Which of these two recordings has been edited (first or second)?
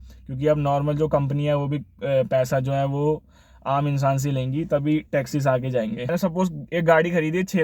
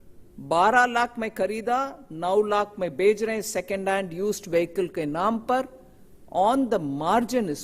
first